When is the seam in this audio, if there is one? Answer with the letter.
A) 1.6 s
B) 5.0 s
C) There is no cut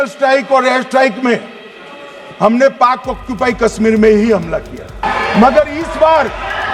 B